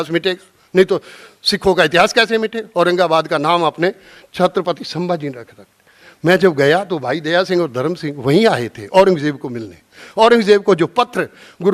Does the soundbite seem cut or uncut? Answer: uncut